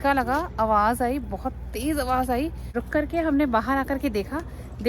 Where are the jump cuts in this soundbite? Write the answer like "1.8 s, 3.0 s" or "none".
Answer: 2.7 s